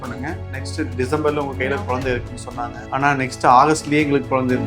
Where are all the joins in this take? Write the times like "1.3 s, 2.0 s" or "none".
2.8 s